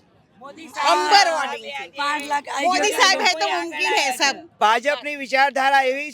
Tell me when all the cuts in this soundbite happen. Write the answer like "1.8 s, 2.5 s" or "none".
4.5 s